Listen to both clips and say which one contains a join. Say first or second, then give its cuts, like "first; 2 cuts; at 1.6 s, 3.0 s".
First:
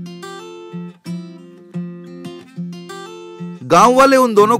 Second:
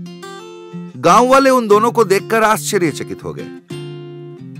second; 1 cut; at 0.9 s